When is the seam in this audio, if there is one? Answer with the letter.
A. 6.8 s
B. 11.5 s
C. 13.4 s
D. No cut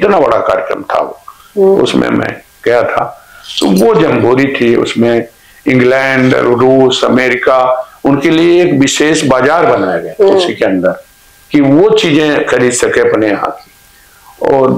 D